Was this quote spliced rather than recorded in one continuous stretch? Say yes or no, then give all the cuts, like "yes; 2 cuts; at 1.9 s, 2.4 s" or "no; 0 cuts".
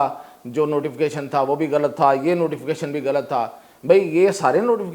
no; 0 cuts